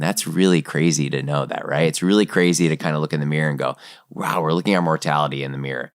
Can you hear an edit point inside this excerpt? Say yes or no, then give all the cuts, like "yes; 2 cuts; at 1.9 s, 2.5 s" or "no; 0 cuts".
yes; 1 cut; at 5.0 s